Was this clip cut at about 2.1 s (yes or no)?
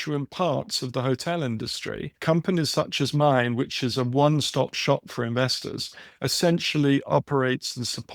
yes